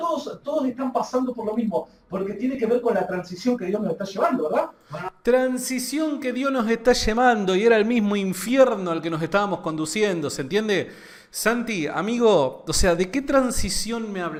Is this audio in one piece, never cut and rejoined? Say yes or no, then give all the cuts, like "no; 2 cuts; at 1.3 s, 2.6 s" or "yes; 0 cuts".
yes; 0 cuts